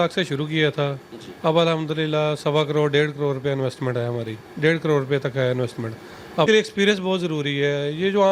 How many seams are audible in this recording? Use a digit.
1